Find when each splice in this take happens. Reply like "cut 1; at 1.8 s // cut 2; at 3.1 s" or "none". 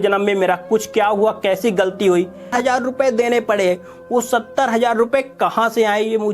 cut 1; at 2.5 s